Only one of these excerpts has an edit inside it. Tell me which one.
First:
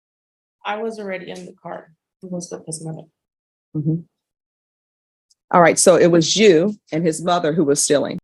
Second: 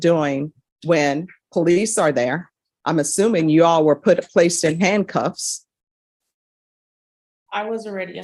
first; 1 cut; at 2.5 s

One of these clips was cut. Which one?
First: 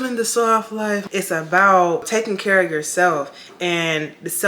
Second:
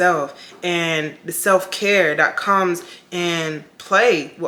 first; 2 cuts; at 1.0 s, 2.1 s

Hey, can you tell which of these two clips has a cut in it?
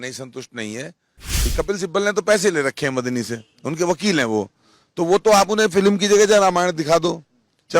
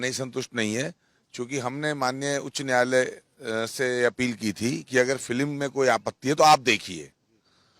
first; 1 cut; at 1.4 s

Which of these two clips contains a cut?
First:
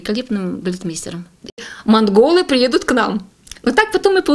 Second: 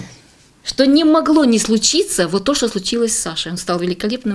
first; 1 cut; at 1.5 s

